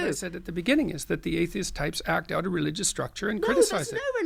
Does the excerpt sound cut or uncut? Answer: uncut